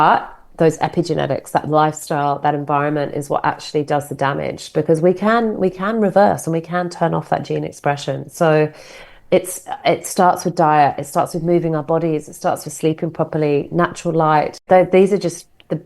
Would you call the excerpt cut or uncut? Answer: cut